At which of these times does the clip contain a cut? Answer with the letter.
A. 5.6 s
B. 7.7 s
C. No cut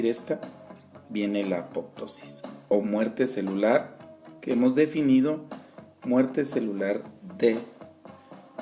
B